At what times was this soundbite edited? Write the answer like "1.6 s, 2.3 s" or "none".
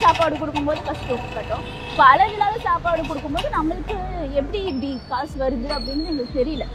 none